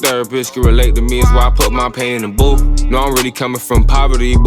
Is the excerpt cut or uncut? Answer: uncut